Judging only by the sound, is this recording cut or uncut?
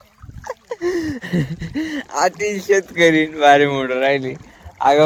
uncut